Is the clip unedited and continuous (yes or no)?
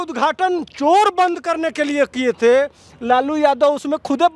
yes